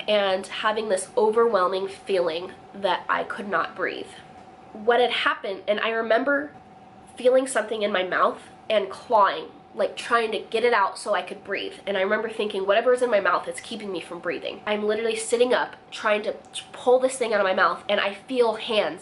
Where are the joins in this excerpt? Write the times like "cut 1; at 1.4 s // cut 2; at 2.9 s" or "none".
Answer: none